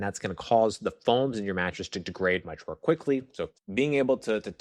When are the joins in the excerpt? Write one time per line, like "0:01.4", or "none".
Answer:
0:03.5